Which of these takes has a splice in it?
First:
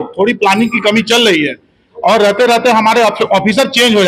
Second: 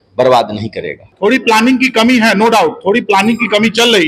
second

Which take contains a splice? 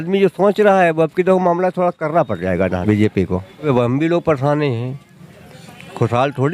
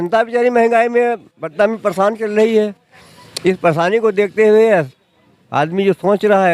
first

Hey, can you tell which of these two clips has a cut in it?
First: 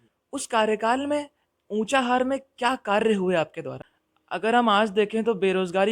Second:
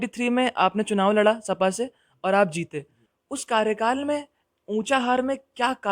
first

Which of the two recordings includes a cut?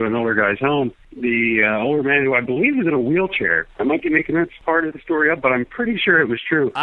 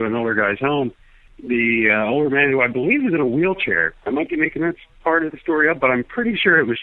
first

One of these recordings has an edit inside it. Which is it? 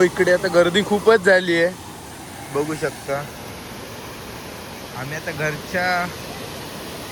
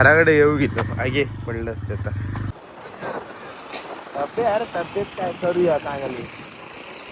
second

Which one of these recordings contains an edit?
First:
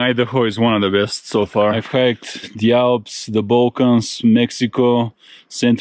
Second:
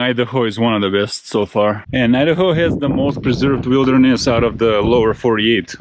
second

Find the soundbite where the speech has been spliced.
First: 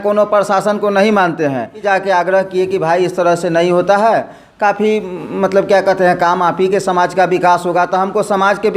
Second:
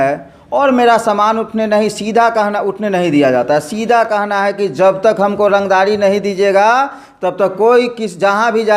first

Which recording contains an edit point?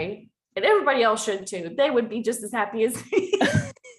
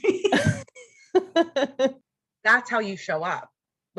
second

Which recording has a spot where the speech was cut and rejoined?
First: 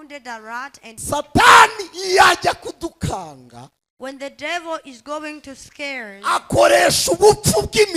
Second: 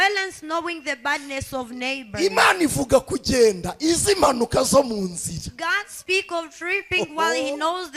first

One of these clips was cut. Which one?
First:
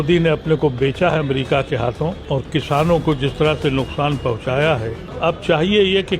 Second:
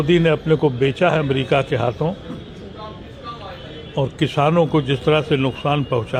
first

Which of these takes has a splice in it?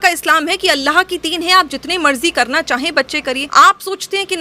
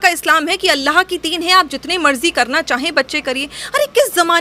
first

